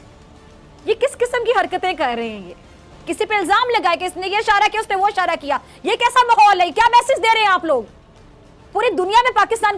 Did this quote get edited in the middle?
yes; 1 cut; at 2.9 s

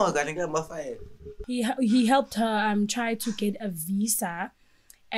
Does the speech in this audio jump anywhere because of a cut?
yes; 1 cut; at 1.3 s

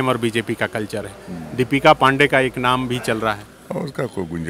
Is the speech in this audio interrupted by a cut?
no; 0 cuts

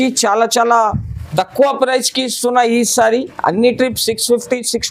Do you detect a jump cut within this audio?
no; 0 cuts

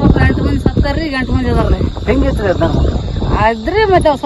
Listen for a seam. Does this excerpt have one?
no; 0 cuts

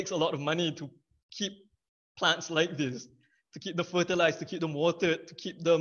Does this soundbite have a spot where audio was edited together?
no; 0 cuts

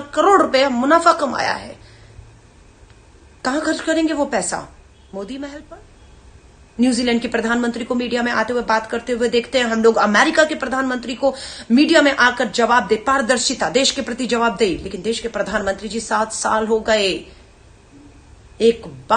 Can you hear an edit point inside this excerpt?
yes; 1 cut; at 5.6 s

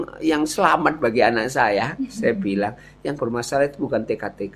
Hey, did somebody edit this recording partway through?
no; 0 cuts

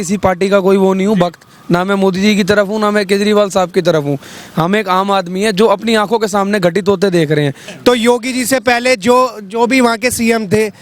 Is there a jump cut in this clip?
yes; 1 cut; at 7.7 s

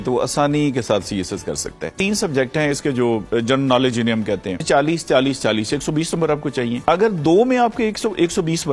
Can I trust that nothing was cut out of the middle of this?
no; 3 cuts; at 1.9 s, 4.6 s, 6.8 s

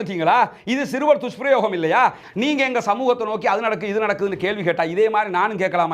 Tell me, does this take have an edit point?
yes; 1 cut; at 2.2 s

